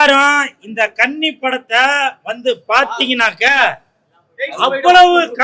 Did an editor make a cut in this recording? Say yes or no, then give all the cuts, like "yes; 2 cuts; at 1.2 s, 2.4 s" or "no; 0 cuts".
no; 0 cuts